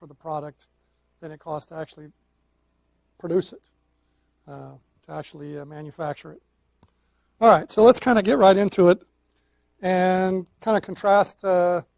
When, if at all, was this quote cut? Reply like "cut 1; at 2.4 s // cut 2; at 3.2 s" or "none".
cut 1; at 3.1 s